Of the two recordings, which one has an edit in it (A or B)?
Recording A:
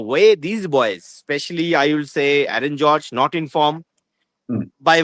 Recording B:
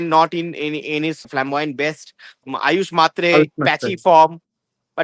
B